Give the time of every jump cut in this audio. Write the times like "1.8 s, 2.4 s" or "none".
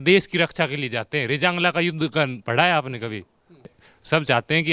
none